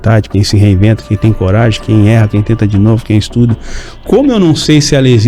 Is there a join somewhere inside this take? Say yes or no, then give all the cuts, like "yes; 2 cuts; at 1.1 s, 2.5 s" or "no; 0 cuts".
no; 0 cuts